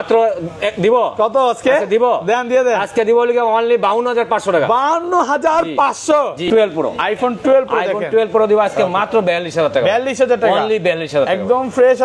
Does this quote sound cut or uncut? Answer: cut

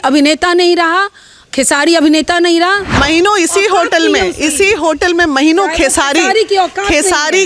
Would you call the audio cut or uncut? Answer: cut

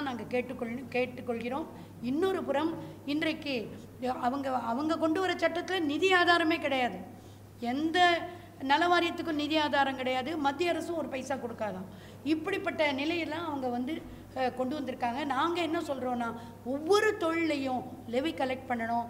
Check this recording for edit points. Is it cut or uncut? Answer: uncut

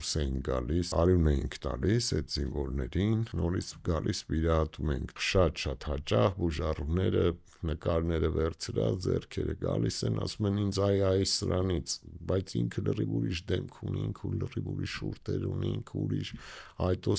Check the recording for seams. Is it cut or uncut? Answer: cut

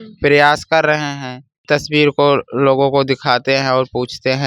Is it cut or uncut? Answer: cut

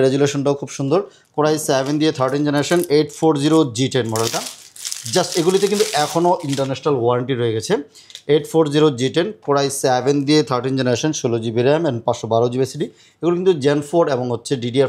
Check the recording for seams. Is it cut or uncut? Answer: cut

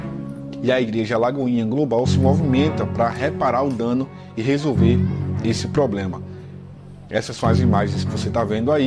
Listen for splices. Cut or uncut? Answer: uncut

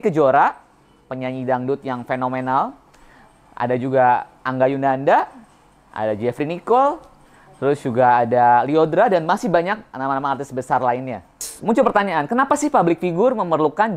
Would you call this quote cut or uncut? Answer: cut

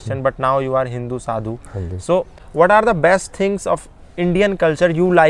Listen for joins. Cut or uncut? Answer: uncut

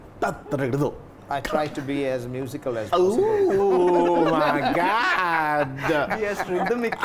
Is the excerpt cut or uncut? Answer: uncut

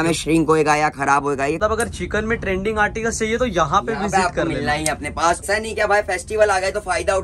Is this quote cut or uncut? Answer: cut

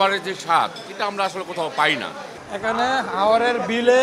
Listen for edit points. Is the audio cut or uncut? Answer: cut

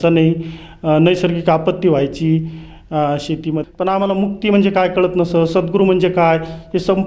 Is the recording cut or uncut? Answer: cut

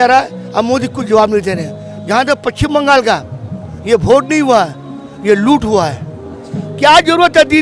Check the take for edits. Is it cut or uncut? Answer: uncut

